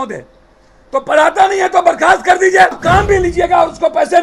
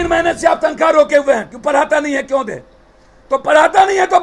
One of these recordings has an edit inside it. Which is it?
first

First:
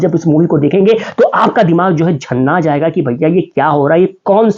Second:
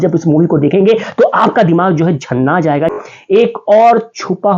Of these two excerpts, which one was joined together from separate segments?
second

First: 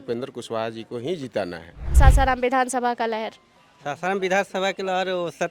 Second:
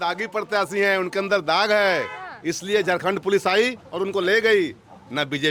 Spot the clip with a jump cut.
first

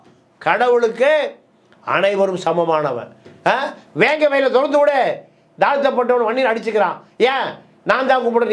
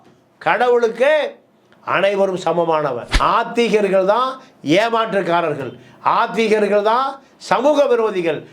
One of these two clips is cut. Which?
second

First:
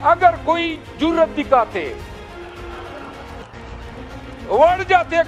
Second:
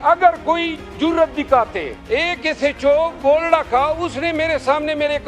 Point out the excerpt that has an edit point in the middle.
second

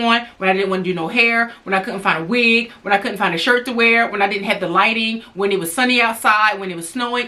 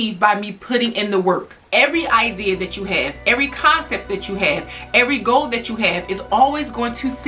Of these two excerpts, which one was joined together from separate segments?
second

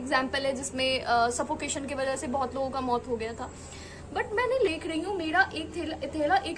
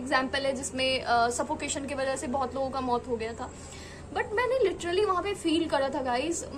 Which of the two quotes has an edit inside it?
first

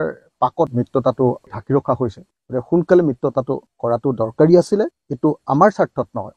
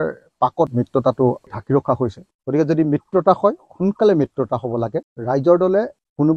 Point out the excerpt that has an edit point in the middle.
second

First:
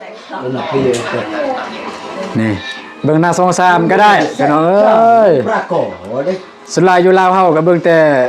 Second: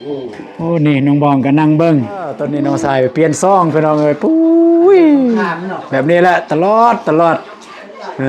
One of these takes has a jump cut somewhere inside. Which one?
second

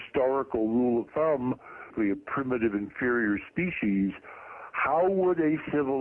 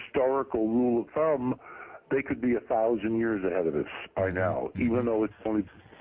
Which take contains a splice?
second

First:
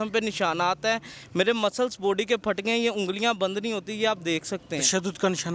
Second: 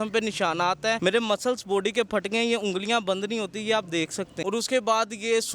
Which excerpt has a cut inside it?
second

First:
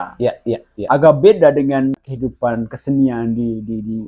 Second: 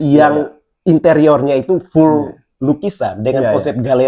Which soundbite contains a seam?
first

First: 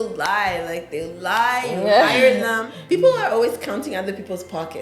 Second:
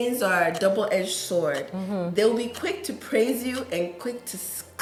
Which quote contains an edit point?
first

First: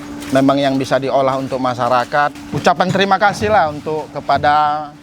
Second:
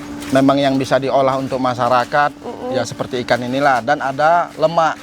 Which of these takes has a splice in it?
first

